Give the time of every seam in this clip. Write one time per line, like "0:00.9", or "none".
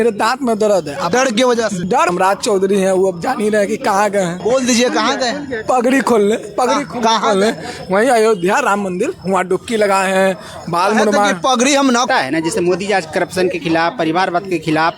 0:02.1
0:12.1